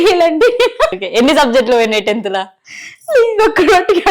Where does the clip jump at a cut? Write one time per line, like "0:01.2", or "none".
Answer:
0:00.9